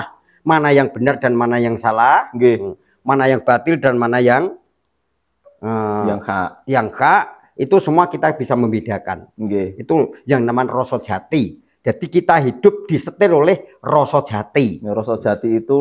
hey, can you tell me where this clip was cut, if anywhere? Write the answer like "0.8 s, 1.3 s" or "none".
none